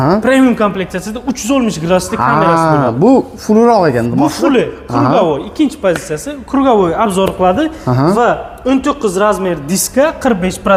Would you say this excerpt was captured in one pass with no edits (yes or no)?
yes